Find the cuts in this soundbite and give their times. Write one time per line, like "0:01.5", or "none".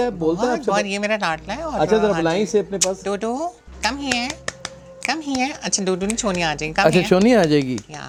none